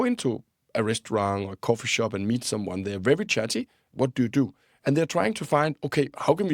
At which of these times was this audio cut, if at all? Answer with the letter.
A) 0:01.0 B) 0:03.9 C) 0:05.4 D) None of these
B